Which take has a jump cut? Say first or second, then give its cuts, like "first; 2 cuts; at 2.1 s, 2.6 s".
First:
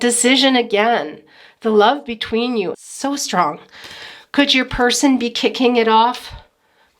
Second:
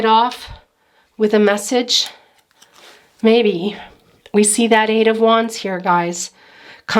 first; 1 cut; at 2.8 s